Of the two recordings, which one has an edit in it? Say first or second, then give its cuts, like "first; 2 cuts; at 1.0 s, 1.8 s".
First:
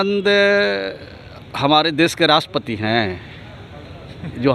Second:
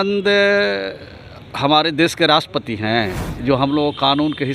second; 1 cut; at 3.2 s